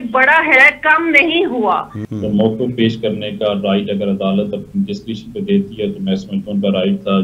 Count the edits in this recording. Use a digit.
1